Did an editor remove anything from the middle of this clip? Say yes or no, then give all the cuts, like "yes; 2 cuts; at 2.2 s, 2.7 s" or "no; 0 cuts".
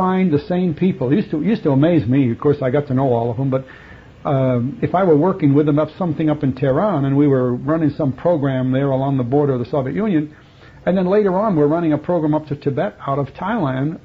no; 0 cuts